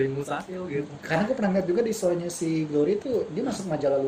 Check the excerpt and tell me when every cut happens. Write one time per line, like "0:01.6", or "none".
none